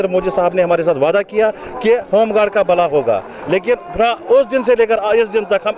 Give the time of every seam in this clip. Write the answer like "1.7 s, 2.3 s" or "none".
none

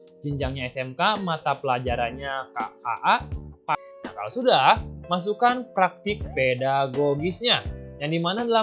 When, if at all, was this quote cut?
3.7 s

